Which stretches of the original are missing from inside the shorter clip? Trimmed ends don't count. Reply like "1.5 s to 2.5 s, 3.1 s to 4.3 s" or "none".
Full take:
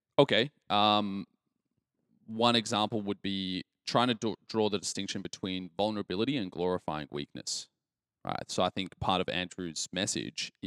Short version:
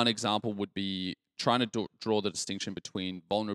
none